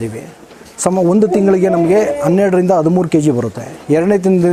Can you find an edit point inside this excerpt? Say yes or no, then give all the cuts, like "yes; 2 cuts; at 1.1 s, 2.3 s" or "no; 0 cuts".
no; 0 cuts